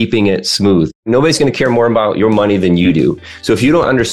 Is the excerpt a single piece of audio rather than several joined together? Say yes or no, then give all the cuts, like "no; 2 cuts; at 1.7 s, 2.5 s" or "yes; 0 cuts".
no; 1 cut; at 1.0 s